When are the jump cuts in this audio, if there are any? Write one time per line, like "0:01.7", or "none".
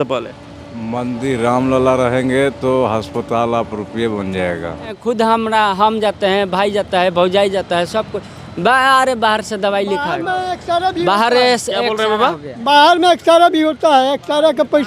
0:05.0